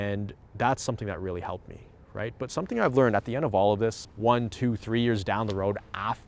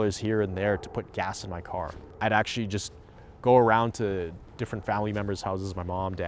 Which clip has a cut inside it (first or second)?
second